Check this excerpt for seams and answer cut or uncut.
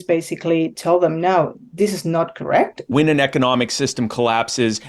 cut